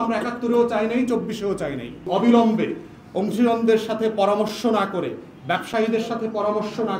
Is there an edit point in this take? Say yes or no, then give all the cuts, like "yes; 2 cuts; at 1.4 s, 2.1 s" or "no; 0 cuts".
yes; 1 cut; at 2.0 s